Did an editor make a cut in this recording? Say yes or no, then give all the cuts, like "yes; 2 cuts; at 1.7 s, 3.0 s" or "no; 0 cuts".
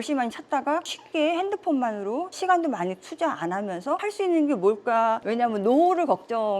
yes; 4 cuts; at 0.8 s, 2.3 s, 4.0 s, 5.2 s